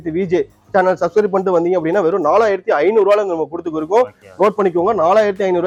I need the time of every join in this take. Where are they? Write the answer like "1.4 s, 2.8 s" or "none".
none